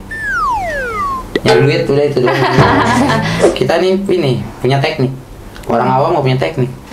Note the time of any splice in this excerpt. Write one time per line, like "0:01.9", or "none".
0:03.4